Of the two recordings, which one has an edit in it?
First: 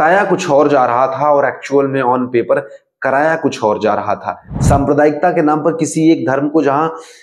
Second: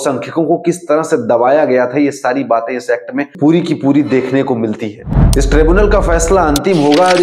second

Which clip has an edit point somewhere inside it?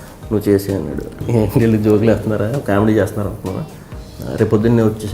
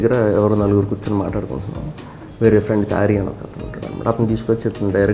first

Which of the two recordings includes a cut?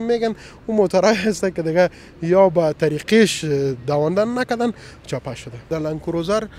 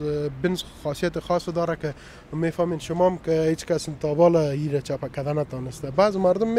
first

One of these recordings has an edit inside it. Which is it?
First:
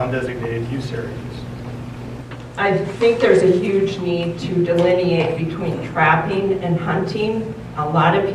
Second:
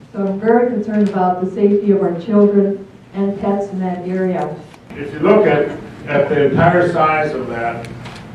second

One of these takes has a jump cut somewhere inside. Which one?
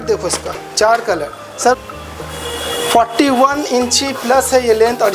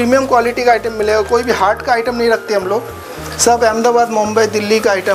first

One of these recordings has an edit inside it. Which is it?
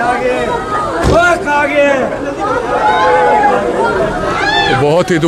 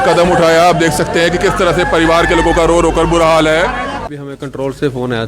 second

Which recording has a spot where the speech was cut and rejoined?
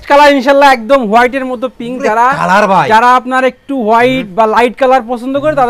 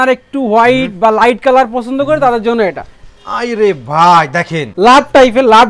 second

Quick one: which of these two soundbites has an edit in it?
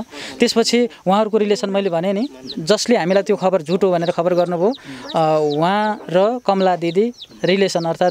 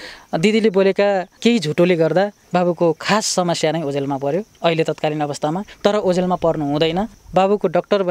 second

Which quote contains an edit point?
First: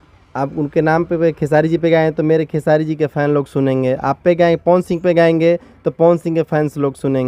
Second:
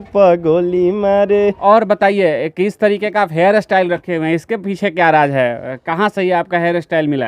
second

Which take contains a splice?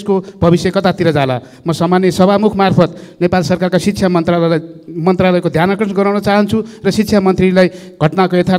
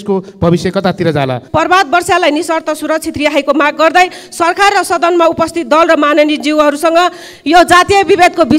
second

